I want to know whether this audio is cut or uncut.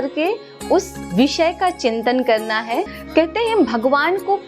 cut